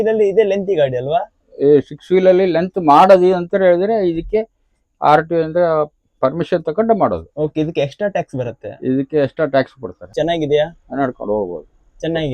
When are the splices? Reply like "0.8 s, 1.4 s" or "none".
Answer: 10.1 s